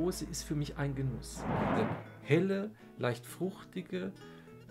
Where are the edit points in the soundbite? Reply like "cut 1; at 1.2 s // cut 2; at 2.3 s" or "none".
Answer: cut 1; at 1.6 s